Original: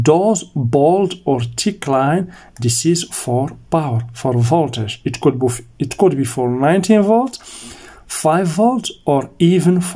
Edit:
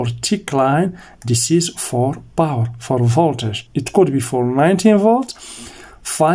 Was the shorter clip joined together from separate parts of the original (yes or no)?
yes